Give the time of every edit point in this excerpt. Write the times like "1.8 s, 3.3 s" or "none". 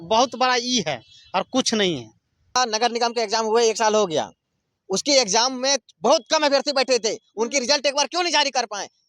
2.6 s